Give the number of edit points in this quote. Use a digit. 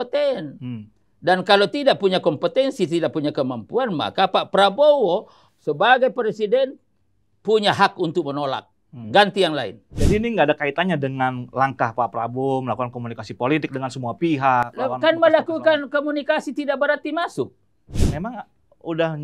2